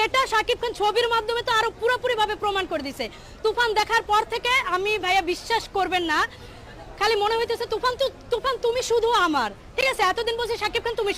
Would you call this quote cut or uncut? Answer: cut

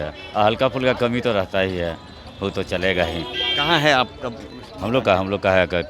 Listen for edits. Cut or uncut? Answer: uncut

